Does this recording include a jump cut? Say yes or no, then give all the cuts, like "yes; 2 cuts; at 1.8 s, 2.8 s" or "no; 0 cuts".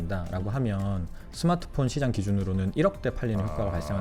no; 0 cuts